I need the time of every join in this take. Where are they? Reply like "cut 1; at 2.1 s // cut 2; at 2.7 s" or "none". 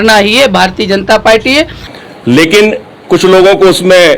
cut 1; at 1.8 s